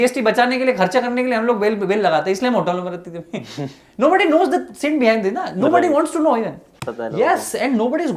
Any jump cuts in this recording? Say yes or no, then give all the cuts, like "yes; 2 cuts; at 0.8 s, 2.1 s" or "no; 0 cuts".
yes; 1 cut; at 6.8 s